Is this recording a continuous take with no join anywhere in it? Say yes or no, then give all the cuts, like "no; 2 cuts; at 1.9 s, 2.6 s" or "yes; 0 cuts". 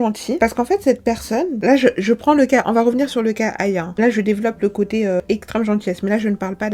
yes; 0 cuts